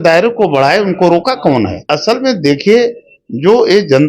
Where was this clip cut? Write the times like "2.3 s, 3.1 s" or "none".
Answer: 1.9 s